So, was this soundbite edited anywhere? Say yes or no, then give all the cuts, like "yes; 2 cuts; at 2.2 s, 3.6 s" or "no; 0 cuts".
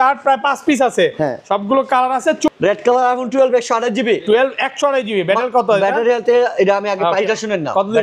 yes; 1 cut; at 2.5 s